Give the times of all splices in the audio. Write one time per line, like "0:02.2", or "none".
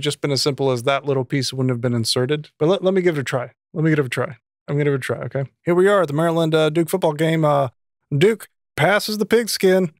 0:02.5
0:05.5